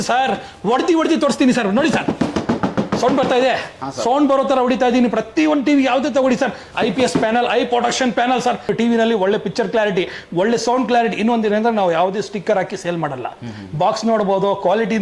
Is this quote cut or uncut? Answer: cut